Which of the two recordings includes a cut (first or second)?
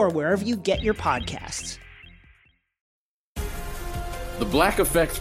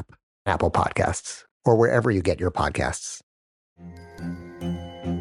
first